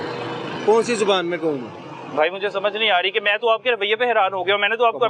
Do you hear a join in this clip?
no; 0 cuts

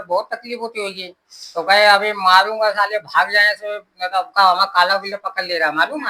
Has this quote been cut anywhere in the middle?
no; 0 cuts

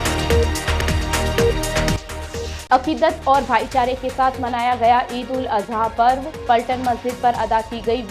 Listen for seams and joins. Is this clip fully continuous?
no; 1 cut; at 1.9 s

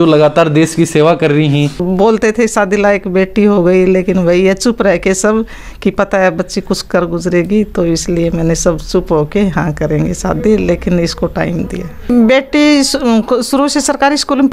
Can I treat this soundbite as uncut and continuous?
no; 2 cuts; at 1.8 s, 12.1 s

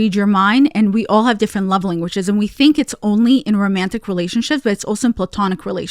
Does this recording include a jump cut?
no; 0 cuts

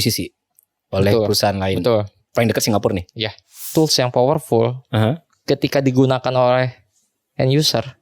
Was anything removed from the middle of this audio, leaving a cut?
yes; 1 cut; at 3.6 s

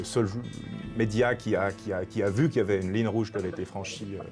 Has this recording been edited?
no; 0 cuts

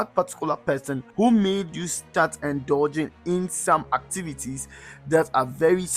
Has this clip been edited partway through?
no; 0 cuts

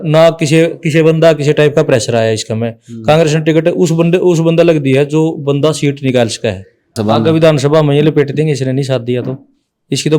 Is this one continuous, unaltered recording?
no; 1 cut; at 7.0 s

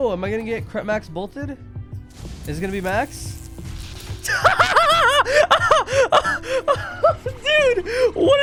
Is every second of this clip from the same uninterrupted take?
yes; 0 cuts

